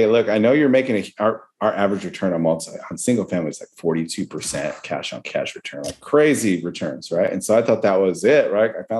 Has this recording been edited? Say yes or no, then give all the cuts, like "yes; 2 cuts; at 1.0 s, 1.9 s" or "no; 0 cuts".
no; 0 cuts